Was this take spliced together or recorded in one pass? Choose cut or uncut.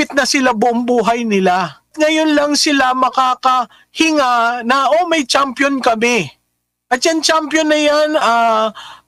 cut